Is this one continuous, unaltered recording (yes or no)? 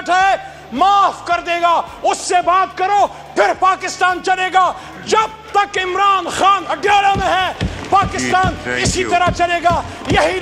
yes